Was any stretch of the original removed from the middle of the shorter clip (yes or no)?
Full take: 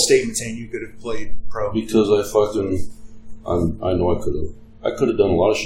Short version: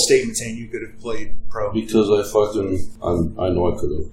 yes